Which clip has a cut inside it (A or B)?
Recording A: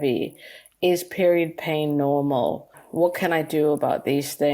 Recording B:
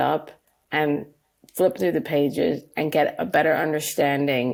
A